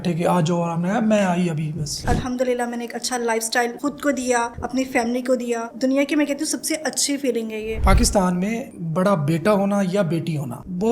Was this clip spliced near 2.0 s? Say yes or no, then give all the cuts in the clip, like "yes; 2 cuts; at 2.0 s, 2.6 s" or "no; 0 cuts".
yes; 3 cuts; at 2.0 s, 5.7 s, 7.8 s